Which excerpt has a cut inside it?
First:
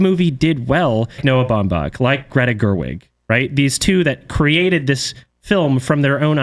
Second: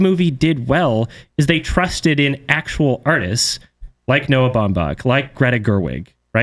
first; 1 cut; at 1.2 s

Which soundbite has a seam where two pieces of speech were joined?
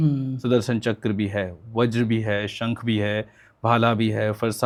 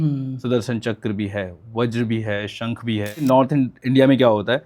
second; 1 cut; at 3.2 s

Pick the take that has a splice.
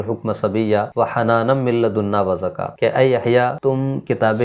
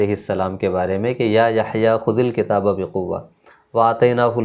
first; 3 cuts; at 0.9 s, 2.6 s, 3.6 s

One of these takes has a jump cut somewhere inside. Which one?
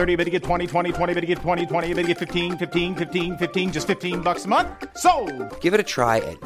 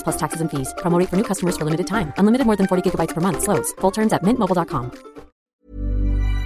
second; 1 cut; at 5.4 s

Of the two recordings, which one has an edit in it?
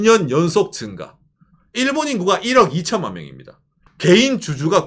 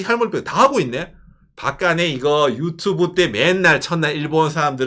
first; 1 cut; at 3.8 s

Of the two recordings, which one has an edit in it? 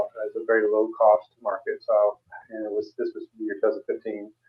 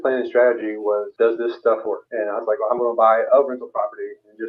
second; 2 cuts; at 1.1 s, 2.0 s

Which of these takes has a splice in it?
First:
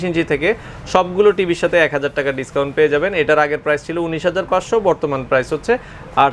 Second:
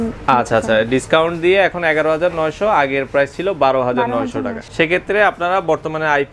second; 1 cut; at 4.6 s

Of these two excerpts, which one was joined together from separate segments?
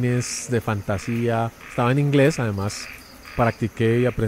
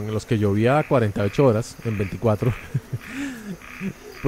first; 1 cut; at 1.7 s

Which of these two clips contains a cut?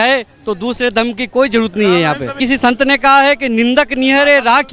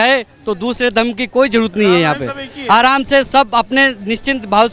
first; 1 cut; at 2.4 s

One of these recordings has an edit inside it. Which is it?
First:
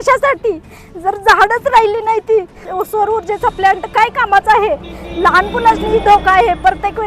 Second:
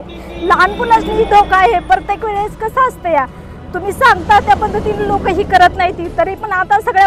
first; 1 cut; at 2.6 s

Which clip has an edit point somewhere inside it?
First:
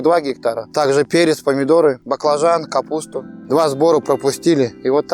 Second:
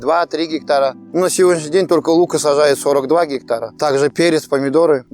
first; 1 cut; at 3.3 s

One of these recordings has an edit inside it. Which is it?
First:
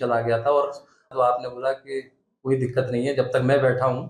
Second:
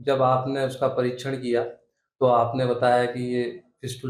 first; 1 cut; at 1.0 s

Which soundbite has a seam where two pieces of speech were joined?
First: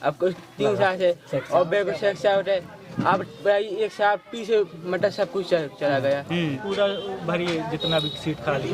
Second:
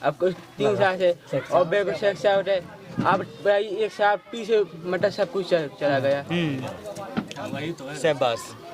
first; 1 cut; at 6.6 s

